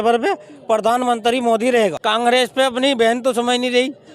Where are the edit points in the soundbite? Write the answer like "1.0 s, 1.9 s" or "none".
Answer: 2.0 s